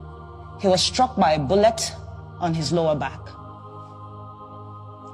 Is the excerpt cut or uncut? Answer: cut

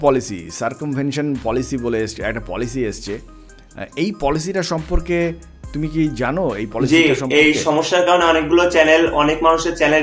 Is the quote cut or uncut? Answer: uncut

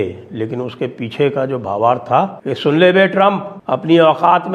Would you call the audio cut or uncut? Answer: cut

